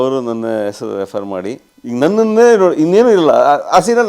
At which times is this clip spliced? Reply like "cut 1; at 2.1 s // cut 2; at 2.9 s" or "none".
cut 1; at 1.7 s